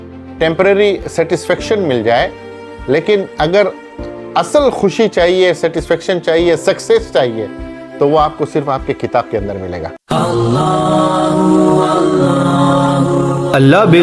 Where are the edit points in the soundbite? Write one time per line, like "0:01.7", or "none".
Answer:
0:09.9